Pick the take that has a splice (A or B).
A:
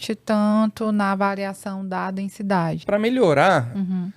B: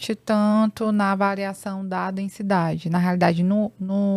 A